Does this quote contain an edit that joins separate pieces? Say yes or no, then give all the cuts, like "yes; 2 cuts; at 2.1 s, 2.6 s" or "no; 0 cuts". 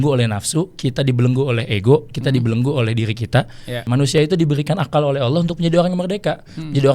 yes; 1 cut; at 3.8 s